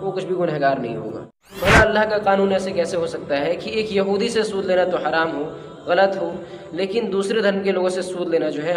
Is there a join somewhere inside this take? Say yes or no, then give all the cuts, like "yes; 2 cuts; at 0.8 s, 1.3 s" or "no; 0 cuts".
yes; 1 cut; at 1.5 s